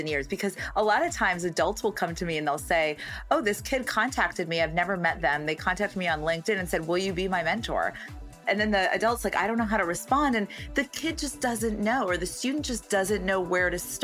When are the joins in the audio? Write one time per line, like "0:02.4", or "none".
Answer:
0:08.4